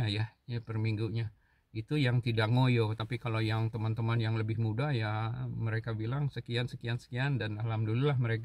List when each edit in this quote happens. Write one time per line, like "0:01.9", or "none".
none